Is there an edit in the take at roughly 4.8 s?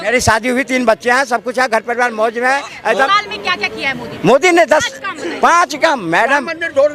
no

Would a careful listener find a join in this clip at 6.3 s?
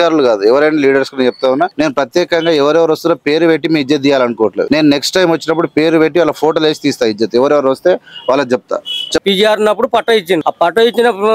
no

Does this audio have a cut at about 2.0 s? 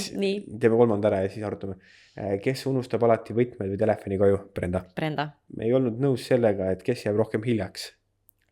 no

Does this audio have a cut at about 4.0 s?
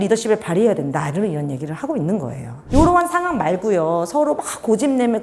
no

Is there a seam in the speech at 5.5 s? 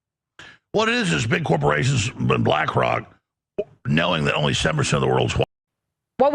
yes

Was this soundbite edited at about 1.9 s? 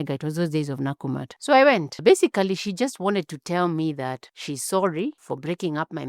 yes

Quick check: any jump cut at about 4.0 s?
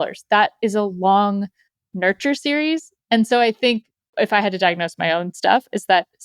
yes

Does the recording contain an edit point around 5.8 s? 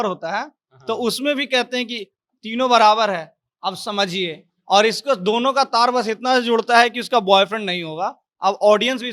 no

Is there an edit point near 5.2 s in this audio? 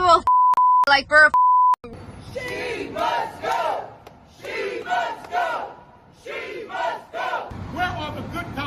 no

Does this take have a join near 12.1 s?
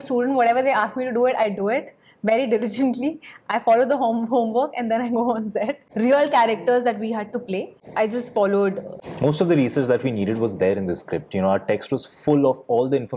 no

